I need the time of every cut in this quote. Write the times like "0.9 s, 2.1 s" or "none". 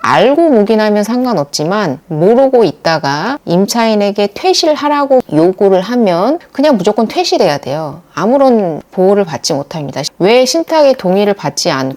10.1 s